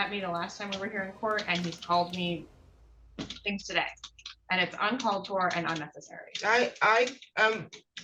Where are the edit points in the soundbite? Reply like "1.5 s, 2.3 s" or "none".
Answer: none